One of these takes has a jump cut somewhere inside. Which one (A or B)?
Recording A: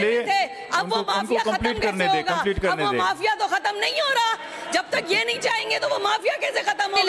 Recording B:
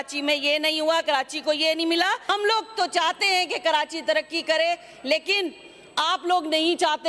B